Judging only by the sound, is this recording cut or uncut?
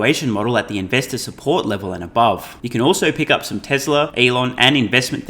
cut